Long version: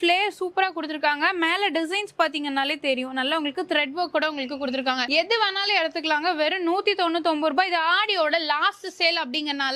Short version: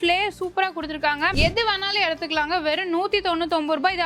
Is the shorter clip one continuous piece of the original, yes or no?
no